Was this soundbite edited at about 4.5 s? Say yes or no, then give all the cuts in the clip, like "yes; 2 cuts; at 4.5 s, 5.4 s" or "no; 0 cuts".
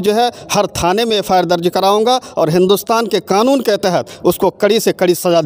no; 0 cuts